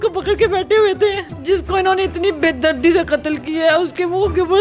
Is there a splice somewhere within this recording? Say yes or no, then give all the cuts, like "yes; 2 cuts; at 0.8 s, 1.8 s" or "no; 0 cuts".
yes; 1 cut; at 1.3 s